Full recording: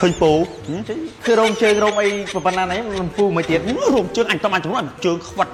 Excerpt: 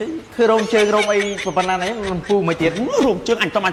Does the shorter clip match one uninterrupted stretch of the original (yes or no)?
yes